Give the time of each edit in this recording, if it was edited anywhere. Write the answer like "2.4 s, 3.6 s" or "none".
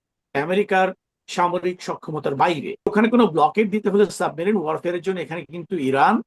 2.9 s